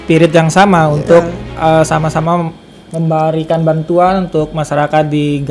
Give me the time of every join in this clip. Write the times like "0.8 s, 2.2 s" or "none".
none